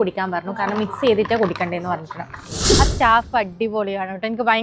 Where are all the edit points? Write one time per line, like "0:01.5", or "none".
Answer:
0:02.6